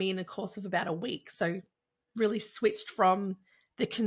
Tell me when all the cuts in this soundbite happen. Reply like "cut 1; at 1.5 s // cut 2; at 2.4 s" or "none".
none